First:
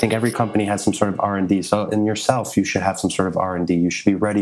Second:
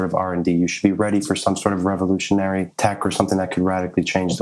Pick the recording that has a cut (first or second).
second